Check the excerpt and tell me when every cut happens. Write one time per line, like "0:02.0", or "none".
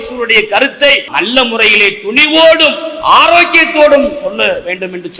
0:01.1